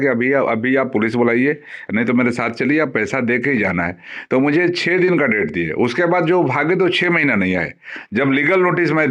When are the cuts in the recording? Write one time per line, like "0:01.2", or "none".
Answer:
none

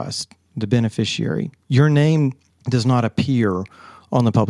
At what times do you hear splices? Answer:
none

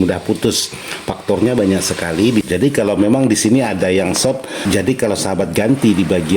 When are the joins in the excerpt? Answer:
0:02.5
0:04.5

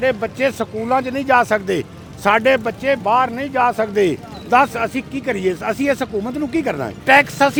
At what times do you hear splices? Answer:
none

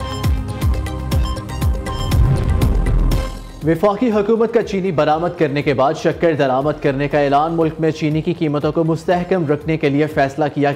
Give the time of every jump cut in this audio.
0:01.2

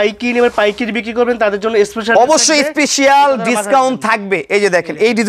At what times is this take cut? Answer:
none

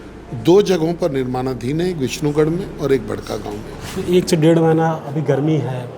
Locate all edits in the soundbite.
0:03.8

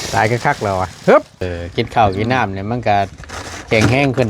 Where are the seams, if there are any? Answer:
0:01.5

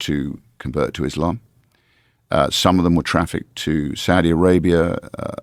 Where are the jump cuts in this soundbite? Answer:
none

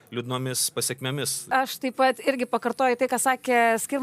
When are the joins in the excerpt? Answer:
0:01.5

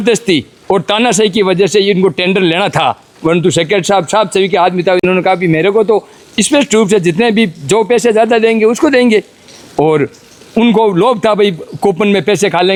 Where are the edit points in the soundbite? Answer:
none

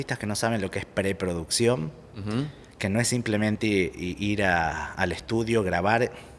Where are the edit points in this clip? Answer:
none

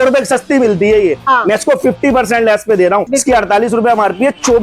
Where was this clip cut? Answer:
0:03.1

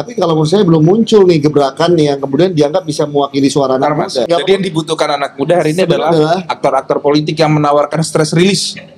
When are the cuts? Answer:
0:04.3

